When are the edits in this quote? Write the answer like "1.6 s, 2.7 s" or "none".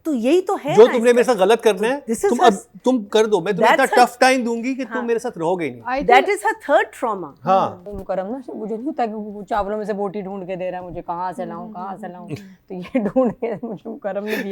7.8 s